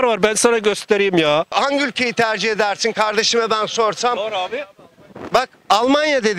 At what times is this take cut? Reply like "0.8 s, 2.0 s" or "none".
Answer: 1.5 s